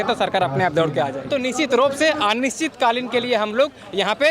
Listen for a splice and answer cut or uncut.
cut